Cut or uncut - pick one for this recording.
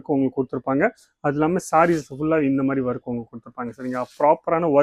uncut